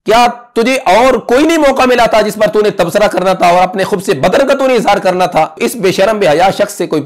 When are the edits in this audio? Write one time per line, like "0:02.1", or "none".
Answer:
0:05.6